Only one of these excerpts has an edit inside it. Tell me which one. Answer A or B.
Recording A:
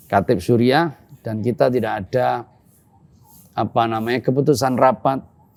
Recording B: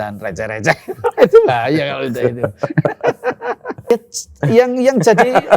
B